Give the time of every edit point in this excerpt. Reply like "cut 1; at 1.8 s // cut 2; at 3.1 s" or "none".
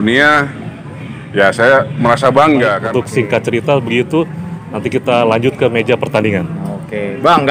cut 1; at 2.9 s